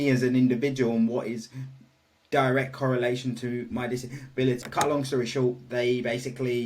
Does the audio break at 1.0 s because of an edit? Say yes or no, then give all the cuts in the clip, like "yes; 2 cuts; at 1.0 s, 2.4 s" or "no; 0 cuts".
no; 1 cut; at 4.6 s